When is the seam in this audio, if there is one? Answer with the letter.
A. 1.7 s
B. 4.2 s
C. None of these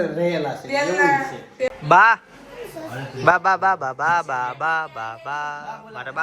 A